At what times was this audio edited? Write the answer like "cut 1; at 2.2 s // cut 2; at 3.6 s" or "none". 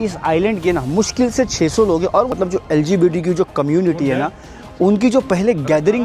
cut 1; at 2.3 s